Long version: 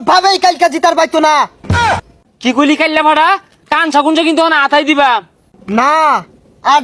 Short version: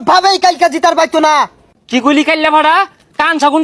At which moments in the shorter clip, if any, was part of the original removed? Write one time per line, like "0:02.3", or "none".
0:01.6